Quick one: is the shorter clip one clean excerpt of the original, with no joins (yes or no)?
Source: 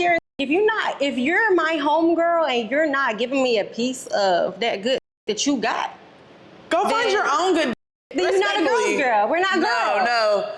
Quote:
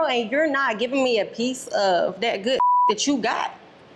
yes